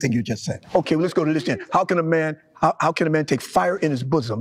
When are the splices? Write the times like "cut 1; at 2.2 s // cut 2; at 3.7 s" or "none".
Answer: none